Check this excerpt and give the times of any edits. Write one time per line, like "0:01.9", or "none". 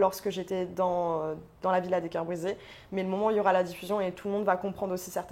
none